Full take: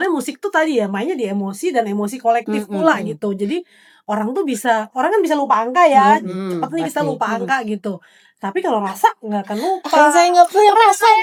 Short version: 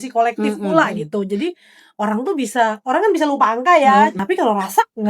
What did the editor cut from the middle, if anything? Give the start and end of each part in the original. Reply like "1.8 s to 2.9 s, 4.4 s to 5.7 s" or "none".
6.3 s to 8.4 s